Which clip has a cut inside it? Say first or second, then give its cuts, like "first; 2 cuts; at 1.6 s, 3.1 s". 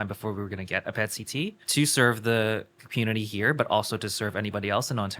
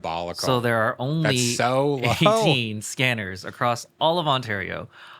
first; 1 cut; at 1.6 s